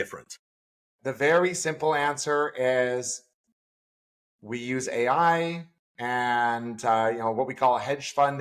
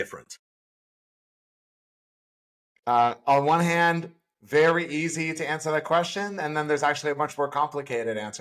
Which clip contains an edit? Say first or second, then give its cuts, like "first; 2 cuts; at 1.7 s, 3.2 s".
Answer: first; 1 cut; at 0.9 s